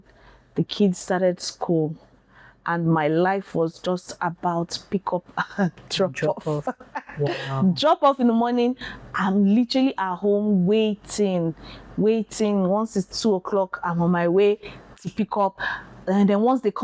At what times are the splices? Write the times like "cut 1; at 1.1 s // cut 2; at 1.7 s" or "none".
none